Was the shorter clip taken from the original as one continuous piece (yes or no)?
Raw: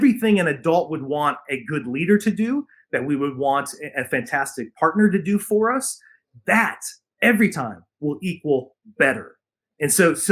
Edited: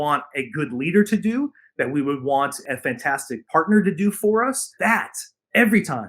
no